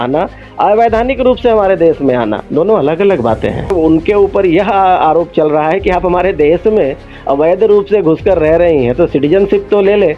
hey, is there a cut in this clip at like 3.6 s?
yes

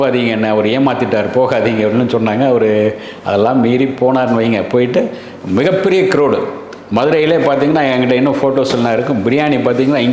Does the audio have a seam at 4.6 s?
no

